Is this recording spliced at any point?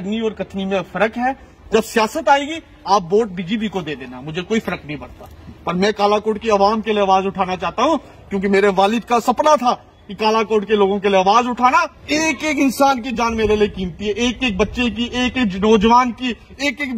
yes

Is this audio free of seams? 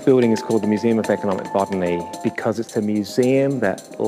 yes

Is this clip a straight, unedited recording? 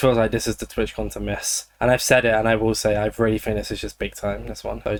yes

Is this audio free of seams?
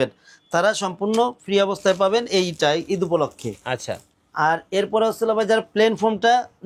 yes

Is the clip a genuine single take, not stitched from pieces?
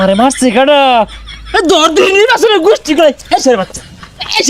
yes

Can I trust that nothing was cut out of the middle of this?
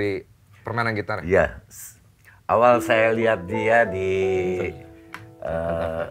yes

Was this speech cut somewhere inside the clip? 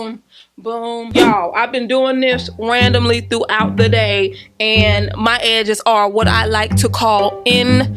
yes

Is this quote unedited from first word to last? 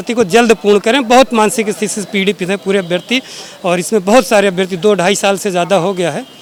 yes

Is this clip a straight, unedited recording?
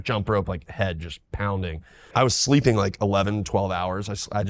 no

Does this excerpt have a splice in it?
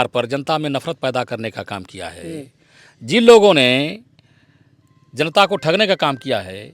no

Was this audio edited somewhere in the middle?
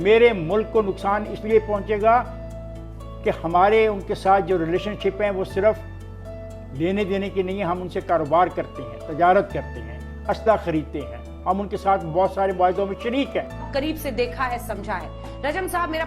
yes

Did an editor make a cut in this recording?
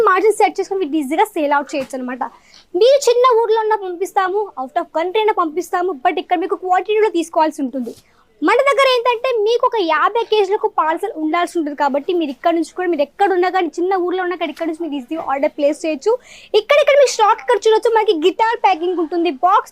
no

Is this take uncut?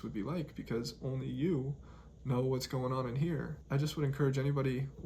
no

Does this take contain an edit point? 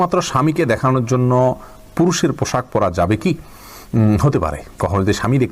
no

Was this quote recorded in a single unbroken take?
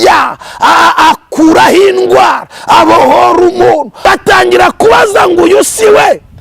no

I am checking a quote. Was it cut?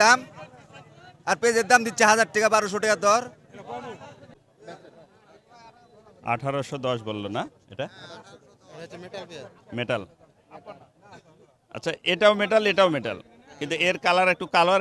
yes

